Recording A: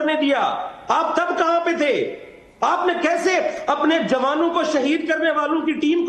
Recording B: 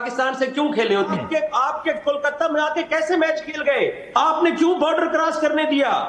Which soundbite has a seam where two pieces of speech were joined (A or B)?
B